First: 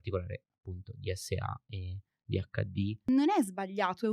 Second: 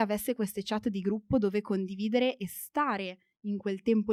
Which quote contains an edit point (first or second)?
first